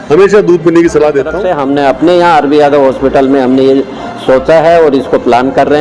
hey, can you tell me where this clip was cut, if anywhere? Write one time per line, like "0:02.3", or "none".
0:01.4